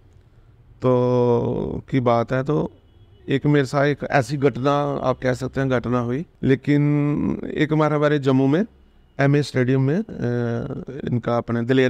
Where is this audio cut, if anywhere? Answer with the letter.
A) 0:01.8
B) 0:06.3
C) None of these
B